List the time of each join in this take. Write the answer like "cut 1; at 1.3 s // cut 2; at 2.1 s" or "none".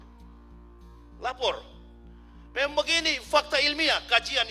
none